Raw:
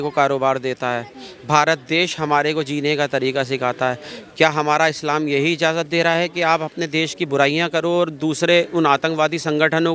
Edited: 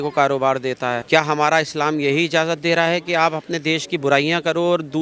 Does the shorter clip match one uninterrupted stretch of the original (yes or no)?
no